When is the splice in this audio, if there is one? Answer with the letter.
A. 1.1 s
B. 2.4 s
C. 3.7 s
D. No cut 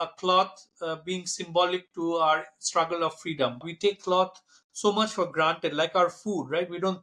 C